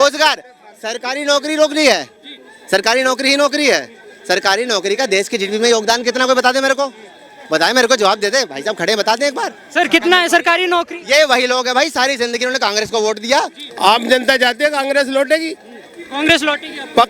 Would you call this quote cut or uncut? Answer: cut